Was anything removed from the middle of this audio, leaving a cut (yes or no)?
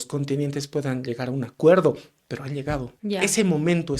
yes